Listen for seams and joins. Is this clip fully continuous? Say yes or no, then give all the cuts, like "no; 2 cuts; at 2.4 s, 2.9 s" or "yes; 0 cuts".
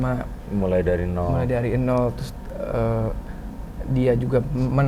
yes; 0 cuts